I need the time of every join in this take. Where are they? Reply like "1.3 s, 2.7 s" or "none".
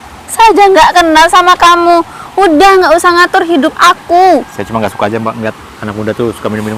none